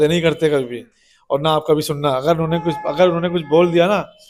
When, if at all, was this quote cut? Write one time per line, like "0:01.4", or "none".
none